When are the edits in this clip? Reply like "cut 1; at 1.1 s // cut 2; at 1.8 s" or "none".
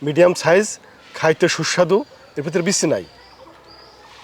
none